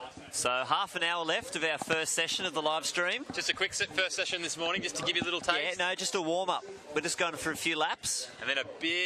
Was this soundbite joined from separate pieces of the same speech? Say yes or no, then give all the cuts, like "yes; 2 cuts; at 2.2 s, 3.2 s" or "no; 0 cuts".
no; 0 cuts